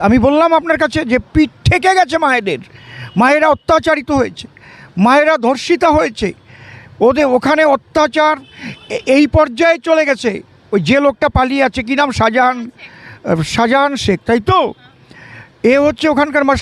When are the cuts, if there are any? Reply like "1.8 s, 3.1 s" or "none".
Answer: none